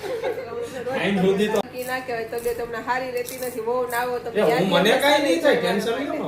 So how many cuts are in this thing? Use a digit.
1